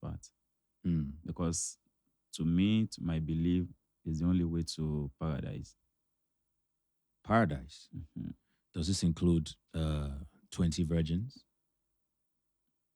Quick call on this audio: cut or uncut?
uncut